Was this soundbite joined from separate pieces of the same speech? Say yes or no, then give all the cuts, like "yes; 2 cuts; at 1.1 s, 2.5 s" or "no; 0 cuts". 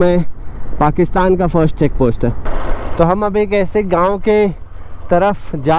yes; 1 cut; at 2.5 s